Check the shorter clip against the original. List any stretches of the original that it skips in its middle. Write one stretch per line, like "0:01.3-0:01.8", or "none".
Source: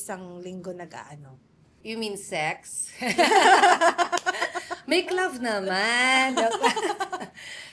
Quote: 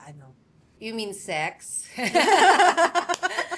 none